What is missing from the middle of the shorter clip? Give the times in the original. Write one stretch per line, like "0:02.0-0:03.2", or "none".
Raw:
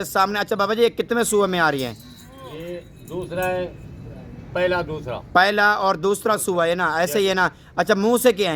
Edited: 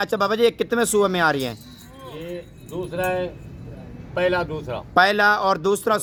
none